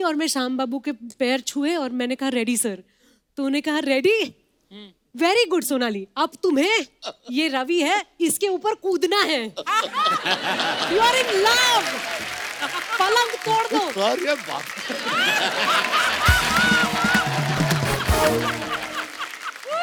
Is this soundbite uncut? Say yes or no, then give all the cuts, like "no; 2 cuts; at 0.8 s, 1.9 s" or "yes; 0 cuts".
yes; 0 cuts